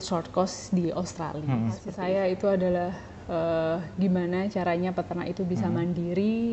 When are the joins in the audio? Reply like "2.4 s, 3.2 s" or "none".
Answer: 1.9 s